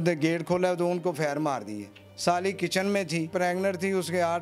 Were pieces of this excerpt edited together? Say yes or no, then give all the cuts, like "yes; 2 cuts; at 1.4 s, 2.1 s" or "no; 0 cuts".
yes; 2 cuts; at 2.0 s, 3.3 s